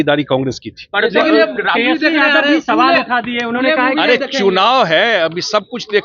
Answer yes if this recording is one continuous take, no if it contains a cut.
no